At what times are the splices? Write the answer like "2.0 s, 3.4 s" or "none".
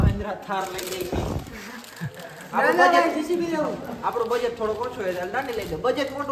none